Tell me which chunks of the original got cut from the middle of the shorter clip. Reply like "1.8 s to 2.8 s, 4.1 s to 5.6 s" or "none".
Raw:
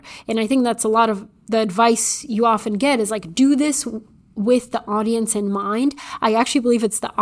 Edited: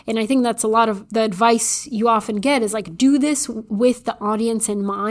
1.2 s to 1.4 s, 3.9 s to 4.2 s